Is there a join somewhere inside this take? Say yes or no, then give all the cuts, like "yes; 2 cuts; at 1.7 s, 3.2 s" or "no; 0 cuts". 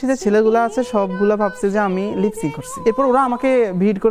yes; 1 cut; at 2.7 s